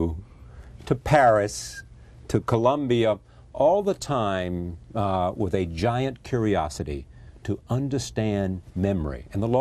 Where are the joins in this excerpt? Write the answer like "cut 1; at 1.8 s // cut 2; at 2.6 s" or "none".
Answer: none